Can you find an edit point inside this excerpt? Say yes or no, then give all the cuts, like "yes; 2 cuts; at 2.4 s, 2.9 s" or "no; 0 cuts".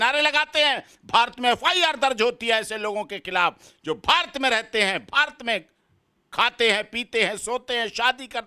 no; 0 cuts